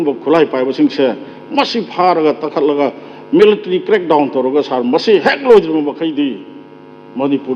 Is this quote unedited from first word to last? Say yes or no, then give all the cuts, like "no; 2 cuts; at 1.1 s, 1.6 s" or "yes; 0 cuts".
yes; 0 cuts